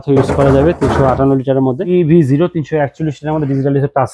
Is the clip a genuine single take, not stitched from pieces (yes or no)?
no